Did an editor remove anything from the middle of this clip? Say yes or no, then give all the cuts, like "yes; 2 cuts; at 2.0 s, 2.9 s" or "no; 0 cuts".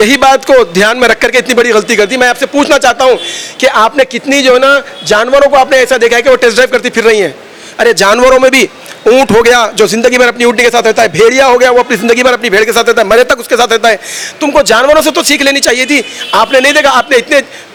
no; 0 cuts